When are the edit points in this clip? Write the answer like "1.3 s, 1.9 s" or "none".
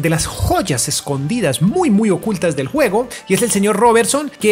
none